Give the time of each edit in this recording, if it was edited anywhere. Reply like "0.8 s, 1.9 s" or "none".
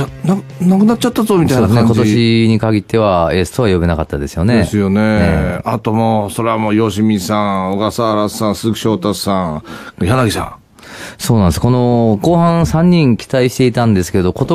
2.5 s